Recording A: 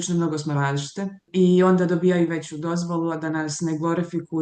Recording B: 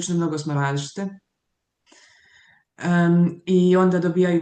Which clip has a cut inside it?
A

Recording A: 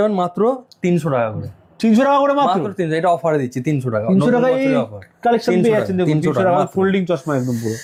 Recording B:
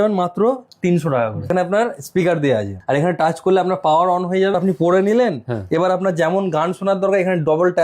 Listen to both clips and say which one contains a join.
B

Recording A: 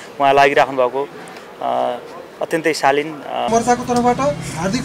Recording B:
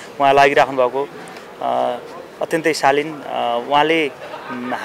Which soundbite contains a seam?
A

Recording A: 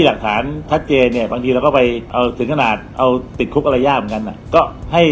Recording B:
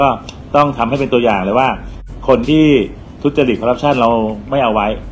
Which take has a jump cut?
A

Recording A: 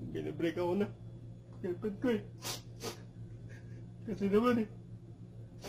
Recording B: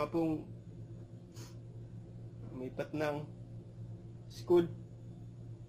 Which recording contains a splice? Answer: B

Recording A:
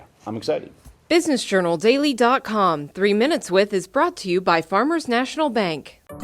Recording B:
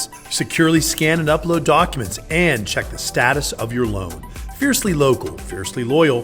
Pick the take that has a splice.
A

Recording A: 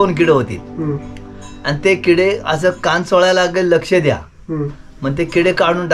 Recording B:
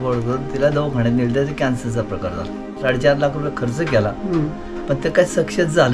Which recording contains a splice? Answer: B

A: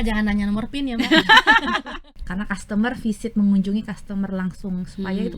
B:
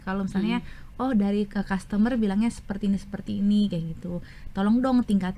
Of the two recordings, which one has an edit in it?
A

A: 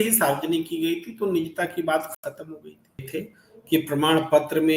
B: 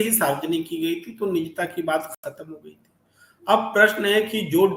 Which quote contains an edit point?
A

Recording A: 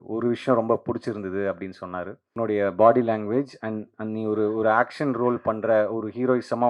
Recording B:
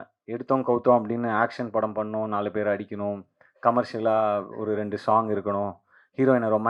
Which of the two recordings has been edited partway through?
A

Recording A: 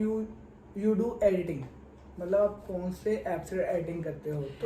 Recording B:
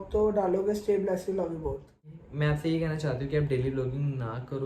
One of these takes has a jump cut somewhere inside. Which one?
B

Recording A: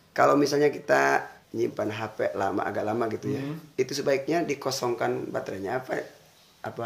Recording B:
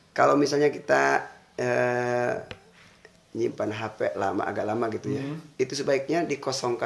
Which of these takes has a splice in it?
A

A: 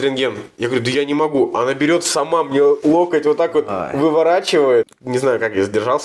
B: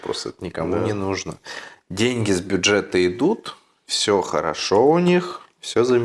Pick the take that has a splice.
A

